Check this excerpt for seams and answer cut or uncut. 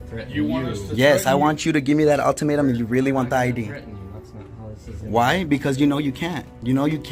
uncut